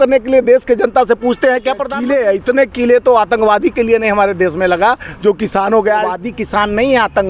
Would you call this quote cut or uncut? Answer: cut